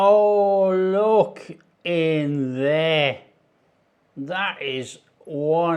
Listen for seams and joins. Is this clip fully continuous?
yes; 0 cuts

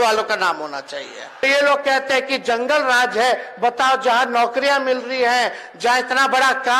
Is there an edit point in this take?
yes; 1 cut; at 1.4 s

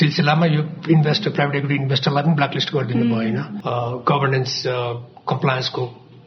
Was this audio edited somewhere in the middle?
yes; 1 cut; at 3.5 s

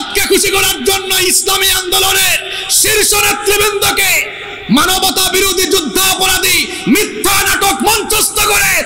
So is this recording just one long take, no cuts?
yes; 0 cuts

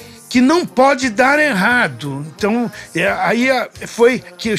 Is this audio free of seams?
yes; 0 cuts

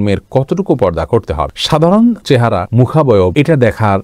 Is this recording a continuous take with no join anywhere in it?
yes; 0 cuts

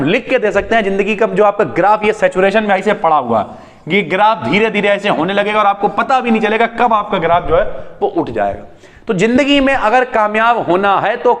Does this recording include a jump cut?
no; 0 cuts

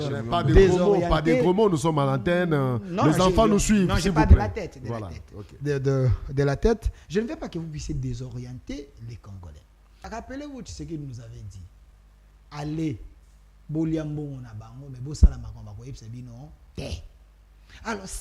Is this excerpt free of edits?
no; 1 cut; at 10.0 s

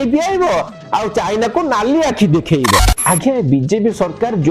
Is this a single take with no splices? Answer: no; 1 cut; at 2.7 s

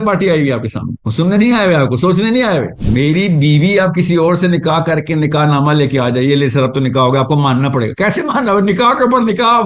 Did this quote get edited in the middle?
yes; 1 cut; at 2.8 s

